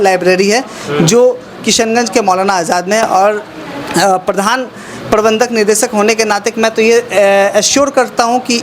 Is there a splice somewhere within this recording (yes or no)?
no